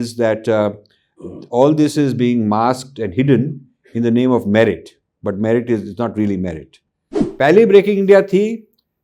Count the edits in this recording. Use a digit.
1